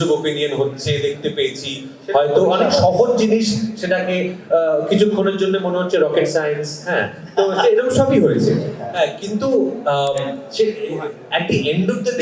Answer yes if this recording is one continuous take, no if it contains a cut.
yes